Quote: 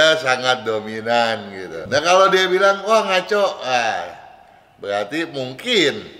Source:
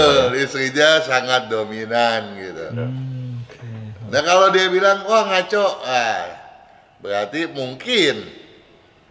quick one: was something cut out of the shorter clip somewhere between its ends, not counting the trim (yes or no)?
yes